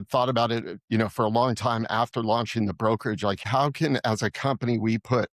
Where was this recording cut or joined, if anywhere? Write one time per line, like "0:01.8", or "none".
0:03.4